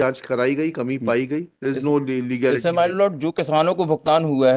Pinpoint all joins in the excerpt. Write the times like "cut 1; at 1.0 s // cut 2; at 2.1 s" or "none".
none

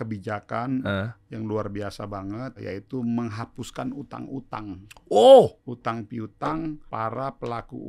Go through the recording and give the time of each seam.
cut 1; at 2.6 s // cut 2; at 5.7 s // cut 3; at 6.8 s

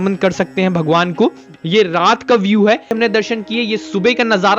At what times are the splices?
cut 1; at 3.0 s

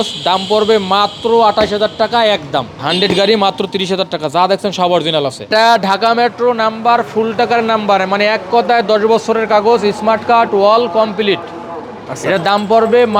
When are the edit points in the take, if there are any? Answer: cut 1; at 2.8 s // cut 2; at 5.5 s

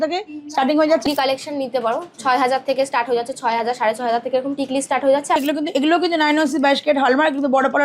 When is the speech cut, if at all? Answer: cut 1; at 1.1 s // cut 2; at 5.4 s

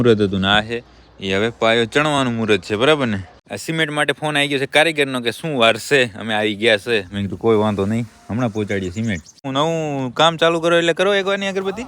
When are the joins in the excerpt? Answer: cut 1; at 3.3 s // cut 2; at 9.5 s

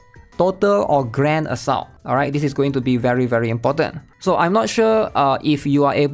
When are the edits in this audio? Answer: cut 1; at 1.9 s // cut 2; at 4.0 s

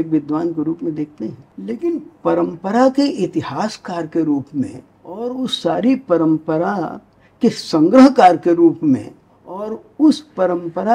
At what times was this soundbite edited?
cut 1; at 1.5 s // cut 2; at 5.5 s // cut 3; at 9.8 s

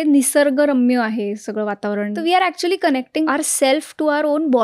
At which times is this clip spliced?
cut 1; at 2.1 s // cut 2; at 3.3 s

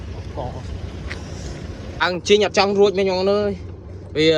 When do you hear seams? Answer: cut 1; at 2.0 s

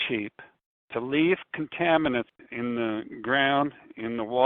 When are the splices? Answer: cut 1; at 2.4 s

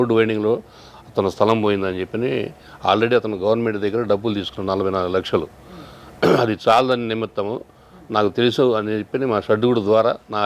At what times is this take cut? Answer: none

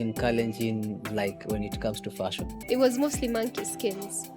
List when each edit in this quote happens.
cut 1; at 2.5 s

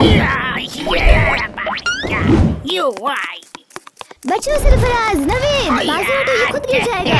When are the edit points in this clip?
none

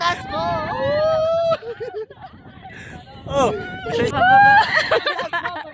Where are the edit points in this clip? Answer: cut 1; at 4.1 s

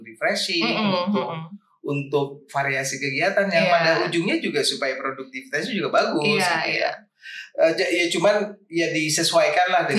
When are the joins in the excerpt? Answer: none

